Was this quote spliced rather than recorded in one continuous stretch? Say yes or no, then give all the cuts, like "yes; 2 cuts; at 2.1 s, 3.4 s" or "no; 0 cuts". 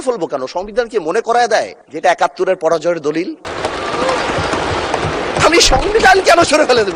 no; 0 cuts